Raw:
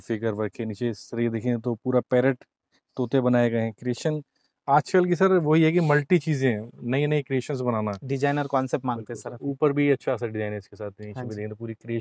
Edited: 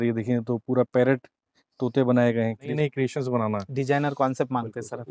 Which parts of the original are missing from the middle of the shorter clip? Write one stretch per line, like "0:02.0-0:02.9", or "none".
0:03.9-0:07.1